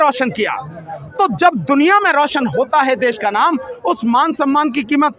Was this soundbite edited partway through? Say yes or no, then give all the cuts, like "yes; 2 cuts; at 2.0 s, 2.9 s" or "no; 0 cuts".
no; 0 cuts